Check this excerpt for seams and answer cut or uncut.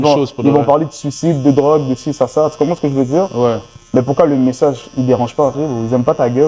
cut